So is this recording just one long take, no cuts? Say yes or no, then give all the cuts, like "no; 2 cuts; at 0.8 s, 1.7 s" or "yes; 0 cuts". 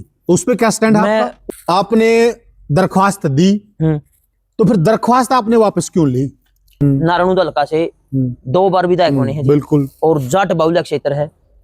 no; 2 cuts; at 1.4 s, 6.7 s